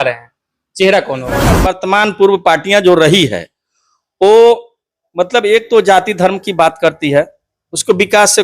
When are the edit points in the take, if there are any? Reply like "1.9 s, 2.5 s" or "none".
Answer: 1.7 s